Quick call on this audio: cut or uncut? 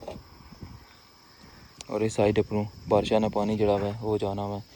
uncut